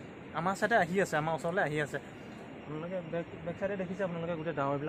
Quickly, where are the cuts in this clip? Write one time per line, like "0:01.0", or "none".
none